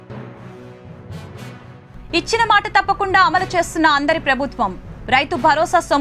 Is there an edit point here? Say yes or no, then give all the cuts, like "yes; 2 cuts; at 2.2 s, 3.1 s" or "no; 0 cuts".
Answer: yes; 1 cut; at 1.4 s